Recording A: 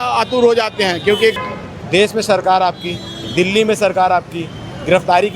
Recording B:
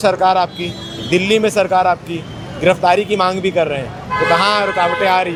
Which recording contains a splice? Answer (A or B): A